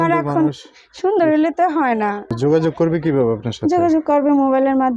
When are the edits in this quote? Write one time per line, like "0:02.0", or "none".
0:02.3